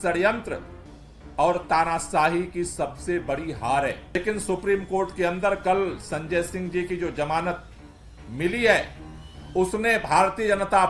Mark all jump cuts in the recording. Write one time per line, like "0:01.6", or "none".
0:04.2